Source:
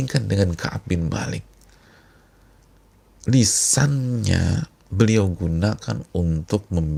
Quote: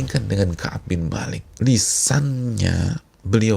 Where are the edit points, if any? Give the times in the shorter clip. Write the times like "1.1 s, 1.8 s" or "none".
1.4 s